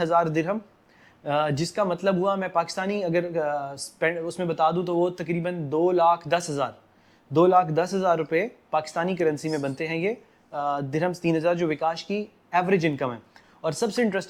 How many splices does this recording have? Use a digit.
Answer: 0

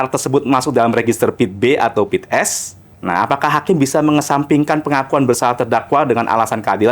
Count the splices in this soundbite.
1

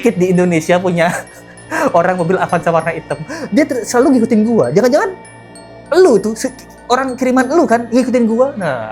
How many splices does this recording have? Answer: 0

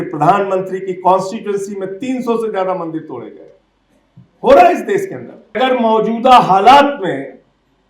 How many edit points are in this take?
1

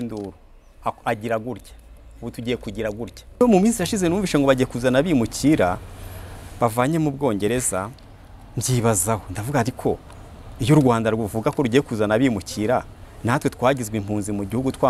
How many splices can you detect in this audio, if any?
1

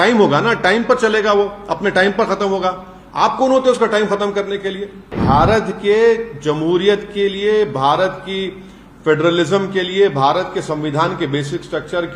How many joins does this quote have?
1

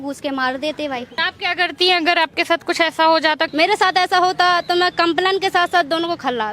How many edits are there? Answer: 2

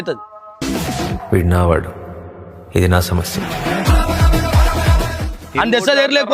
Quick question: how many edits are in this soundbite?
1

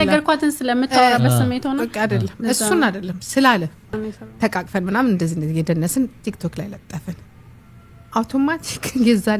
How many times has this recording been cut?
1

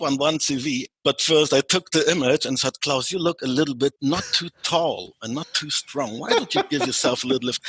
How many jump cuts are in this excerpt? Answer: 2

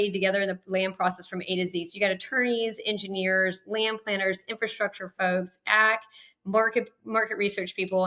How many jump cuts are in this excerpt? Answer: 0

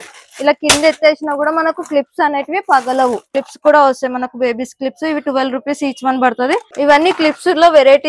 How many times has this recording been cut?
2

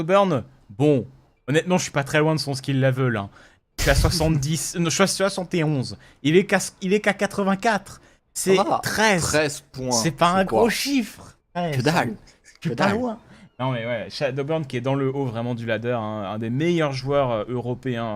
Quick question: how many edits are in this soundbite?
1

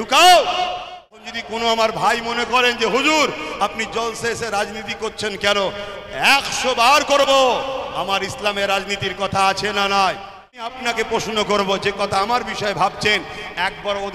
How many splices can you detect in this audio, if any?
2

